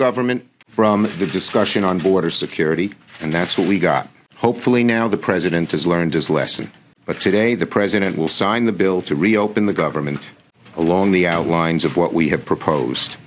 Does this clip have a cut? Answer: yes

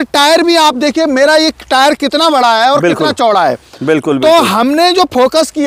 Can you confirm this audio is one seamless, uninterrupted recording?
yes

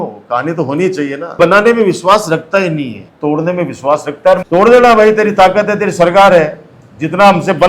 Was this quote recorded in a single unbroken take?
no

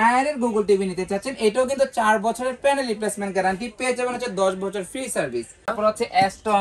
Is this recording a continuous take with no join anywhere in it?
no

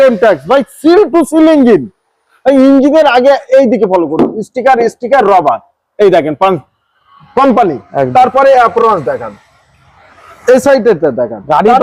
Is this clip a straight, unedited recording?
yes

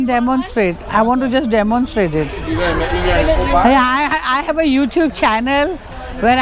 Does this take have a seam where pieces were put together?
no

